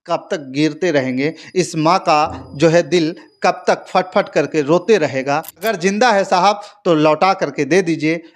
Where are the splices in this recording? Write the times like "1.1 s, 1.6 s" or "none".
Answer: 5.6 s

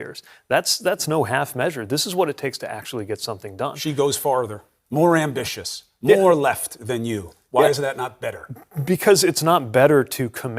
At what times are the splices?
3.7 s

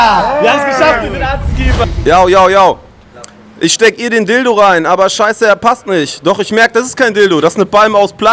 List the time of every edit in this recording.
1.8 s

